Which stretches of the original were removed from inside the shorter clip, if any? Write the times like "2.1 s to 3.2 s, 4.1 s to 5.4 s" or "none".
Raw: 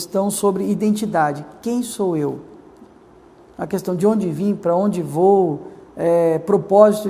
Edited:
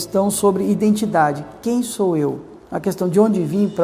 2.5 s to 3.4 s